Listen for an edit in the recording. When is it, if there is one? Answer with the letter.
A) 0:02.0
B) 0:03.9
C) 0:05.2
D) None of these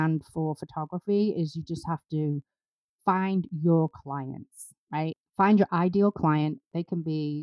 C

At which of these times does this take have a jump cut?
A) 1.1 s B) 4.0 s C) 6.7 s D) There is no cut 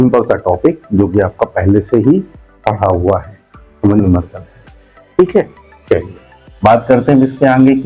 B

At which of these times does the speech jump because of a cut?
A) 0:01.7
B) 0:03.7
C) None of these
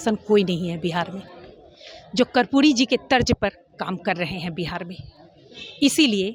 C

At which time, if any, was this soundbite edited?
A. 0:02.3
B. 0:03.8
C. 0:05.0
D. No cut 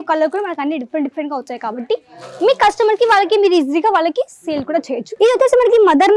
C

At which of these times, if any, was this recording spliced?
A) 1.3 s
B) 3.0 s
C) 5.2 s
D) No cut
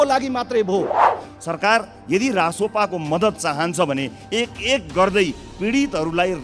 A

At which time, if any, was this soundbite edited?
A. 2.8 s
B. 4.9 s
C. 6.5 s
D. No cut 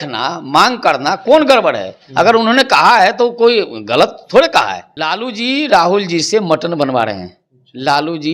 B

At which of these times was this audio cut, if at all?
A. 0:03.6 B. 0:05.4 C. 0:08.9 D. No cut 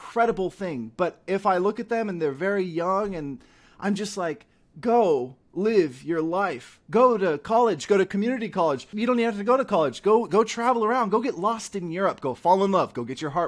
C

